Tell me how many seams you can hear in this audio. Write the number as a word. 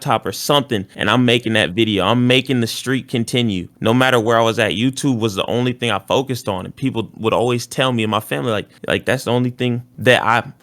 zero